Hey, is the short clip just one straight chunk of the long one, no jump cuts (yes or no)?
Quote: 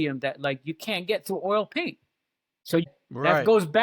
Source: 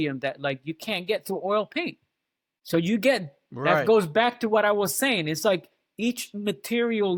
no